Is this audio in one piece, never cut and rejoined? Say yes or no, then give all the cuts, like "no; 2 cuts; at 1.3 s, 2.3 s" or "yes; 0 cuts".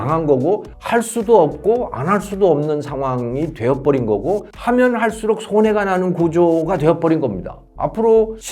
no; 2 cuts; at 4.5 s, 7.5 s